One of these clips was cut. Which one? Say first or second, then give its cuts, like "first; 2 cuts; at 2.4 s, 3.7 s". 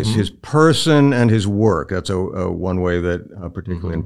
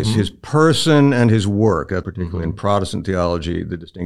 second; 1 cut; at 2.0 s